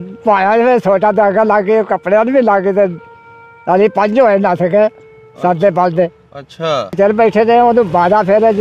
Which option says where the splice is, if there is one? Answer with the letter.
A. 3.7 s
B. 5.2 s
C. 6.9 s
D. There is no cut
C